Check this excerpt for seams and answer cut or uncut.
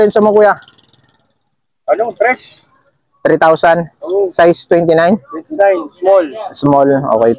uncut